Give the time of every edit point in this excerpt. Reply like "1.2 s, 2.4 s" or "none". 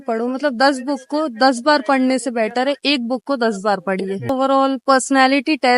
4.3 s